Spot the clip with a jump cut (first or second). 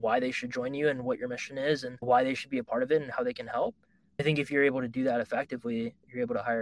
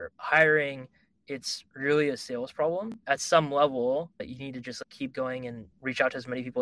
second